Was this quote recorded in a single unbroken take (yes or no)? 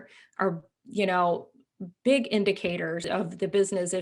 no